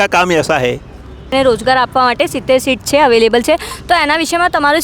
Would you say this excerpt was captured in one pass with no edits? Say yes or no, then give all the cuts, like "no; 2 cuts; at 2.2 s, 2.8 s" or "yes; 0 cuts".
no; 1 cut; at 1.3 s